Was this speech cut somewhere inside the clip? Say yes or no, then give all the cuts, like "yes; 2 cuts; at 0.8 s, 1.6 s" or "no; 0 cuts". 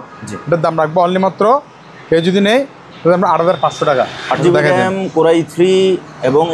yes; 1 cut; at 4.4 s